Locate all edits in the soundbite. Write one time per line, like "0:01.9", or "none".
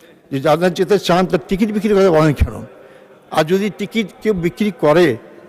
none